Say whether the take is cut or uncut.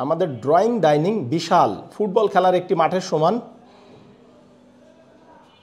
uncut